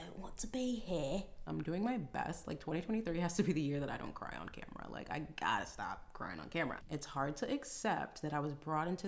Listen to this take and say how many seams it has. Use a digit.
2